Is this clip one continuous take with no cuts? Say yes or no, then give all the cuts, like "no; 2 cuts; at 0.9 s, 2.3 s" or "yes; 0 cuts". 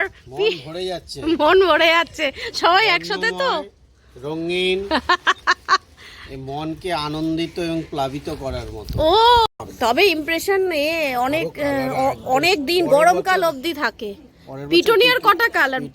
no; 1 cut; at 9.5 s